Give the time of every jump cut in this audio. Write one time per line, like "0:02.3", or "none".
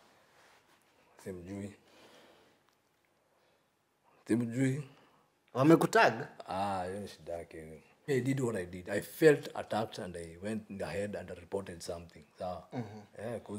0:08.1